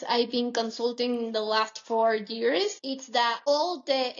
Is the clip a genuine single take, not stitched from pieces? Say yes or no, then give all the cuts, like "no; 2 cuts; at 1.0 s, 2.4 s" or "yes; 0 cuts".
no; 1 cut; at 3.1 s